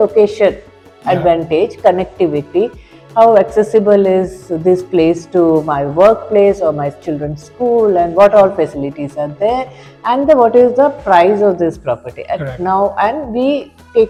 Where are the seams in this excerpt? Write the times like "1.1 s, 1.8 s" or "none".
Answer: none

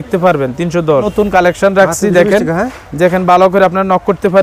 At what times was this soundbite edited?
1.1 s

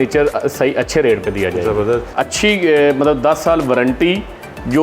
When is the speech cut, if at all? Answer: 2.1 s

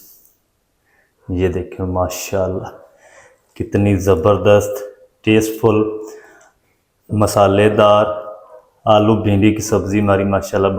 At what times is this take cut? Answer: none

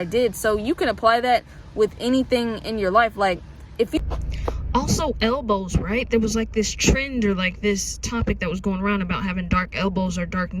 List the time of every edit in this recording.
none

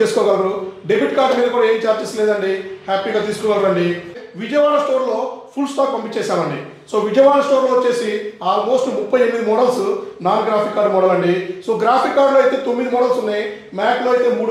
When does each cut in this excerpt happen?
4.2 s

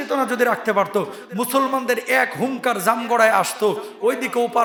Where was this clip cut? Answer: none

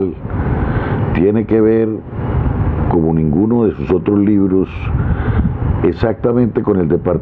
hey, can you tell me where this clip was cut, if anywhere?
none

